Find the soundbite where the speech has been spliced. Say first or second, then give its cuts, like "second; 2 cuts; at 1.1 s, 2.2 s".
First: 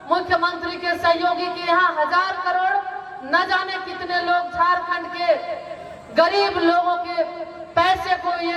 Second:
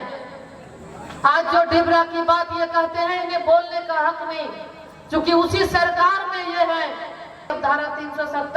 second; 1 cut; at 7.6 s